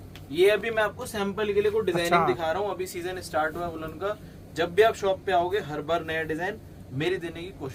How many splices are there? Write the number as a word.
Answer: zero